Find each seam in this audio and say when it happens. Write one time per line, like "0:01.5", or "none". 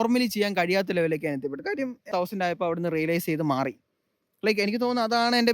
0:02.1